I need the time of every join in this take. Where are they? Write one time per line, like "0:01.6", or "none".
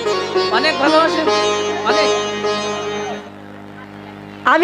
0:03.2